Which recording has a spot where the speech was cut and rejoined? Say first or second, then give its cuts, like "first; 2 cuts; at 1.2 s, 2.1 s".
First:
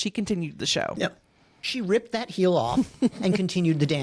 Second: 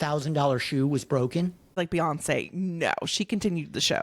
second; 1 cut; at 1.7 s